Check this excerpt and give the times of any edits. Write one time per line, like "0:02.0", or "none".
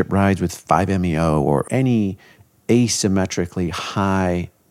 0:01.6